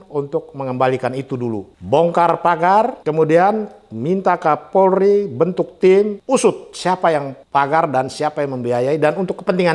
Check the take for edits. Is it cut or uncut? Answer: cut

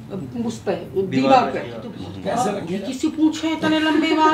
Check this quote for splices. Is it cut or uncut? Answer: cut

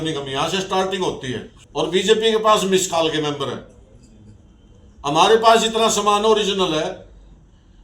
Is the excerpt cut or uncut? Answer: cut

